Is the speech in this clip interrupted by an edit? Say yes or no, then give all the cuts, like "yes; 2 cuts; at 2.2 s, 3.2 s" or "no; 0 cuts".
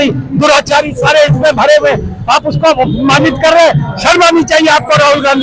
no; 0 cuts